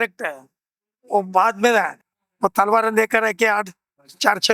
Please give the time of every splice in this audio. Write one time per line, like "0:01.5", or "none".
0:02.0